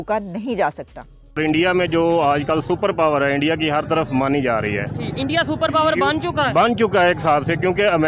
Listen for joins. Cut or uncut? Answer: cut